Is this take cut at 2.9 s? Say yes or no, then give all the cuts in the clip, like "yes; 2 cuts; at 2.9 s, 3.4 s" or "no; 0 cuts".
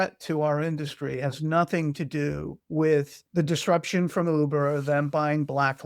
yes; 1 cut; at 2.9 s